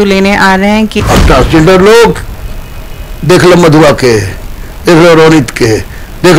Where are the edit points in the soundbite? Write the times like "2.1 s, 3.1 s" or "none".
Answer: 0.9 s